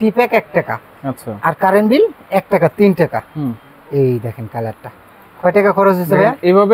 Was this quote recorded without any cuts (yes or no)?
yes